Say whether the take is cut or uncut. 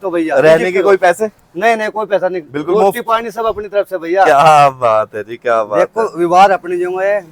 uncut